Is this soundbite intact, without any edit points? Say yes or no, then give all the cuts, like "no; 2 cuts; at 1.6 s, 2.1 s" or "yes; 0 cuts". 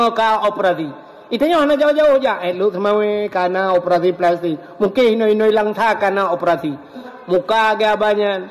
no; 1 cut; at 7.1 s